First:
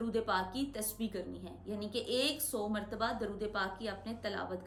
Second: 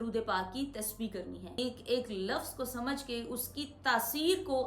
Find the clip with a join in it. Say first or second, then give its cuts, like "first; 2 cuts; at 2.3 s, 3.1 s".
second; 1 cut; at 1.6 s